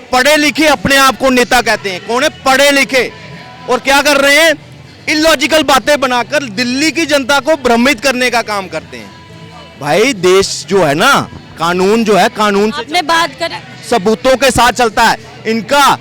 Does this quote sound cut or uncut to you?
uncut